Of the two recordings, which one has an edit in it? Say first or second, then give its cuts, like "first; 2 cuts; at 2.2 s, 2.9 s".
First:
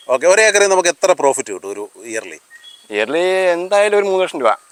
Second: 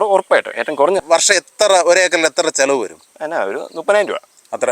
second; 1 cut; at 1.0 s